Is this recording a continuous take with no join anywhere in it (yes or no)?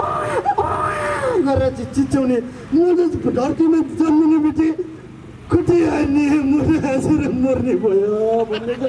yes